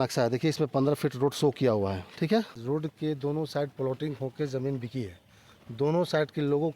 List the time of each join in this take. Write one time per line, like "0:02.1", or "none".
0:02.6